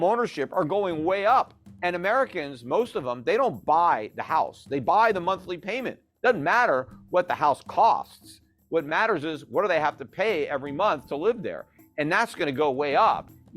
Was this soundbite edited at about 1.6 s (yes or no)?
yes